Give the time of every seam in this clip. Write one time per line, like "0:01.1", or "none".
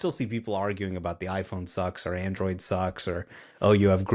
none